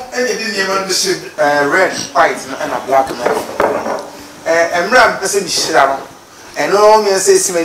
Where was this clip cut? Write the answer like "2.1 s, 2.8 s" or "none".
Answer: 1.3 s